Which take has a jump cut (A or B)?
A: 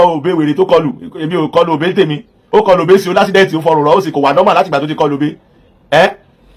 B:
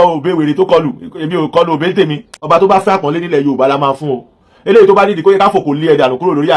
B